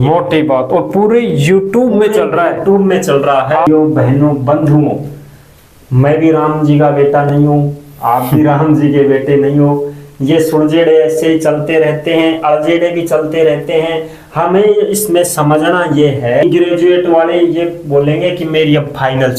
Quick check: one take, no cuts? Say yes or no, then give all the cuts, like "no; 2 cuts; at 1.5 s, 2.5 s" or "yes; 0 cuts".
no; 2 cuts; at 3.7 s, 16.4 s